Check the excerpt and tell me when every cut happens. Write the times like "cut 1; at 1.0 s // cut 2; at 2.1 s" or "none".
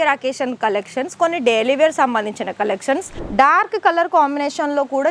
cut 1; at 3.2 s